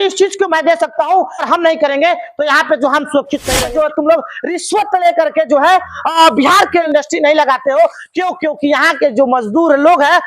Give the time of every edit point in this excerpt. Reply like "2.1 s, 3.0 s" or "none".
1.5 s, 3.6 s, 6.9 s